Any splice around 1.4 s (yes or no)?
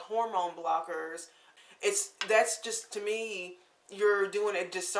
yes